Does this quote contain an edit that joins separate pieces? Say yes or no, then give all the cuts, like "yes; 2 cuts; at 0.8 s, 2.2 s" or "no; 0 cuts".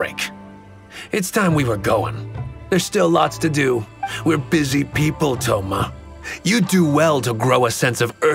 yes; 1 cut; at 4.0 s